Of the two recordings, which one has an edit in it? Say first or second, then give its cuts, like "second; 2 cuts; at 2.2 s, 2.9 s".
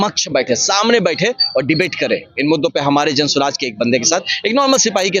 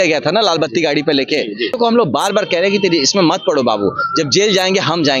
second; 1 cut; at 1.7 s